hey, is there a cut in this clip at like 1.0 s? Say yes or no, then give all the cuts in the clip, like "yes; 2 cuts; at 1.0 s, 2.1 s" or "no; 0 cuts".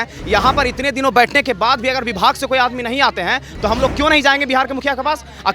no; 1 cut; at 3.5 s